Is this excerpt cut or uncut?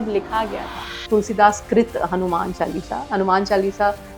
cut